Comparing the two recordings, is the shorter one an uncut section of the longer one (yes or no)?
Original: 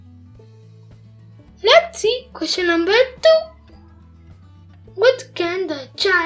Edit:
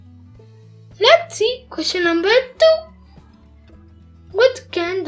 no